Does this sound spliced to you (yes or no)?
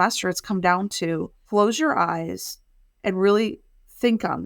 yes